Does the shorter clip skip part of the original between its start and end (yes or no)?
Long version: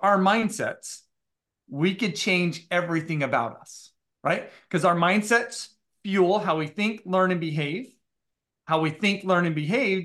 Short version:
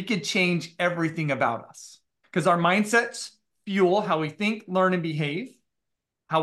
yes